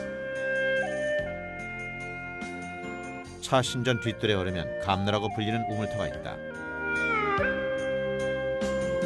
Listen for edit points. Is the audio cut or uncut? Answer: cut